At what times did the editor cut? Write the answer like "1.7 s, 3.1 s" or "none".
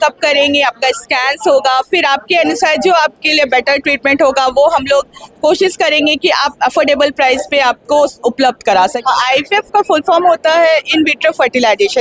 9.0 s